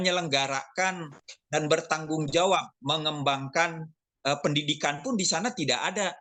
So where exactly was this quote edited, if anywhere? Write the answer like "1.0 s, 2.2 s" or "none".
none